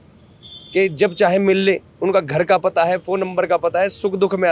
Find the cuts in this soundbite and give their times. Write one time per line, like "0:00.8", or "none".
none